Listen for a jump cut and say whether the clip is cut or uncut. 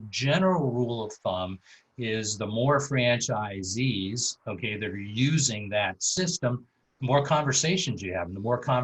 uncut